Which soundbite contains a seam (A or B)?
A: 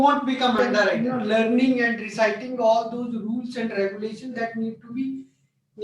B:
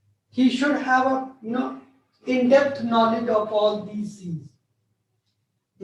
A